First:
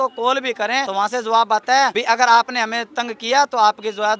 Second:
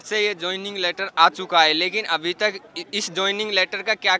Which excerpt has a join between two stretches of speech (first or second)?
first